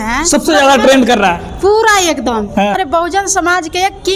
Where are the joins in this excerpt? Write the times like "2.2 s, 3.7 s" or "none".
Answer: 2.8 s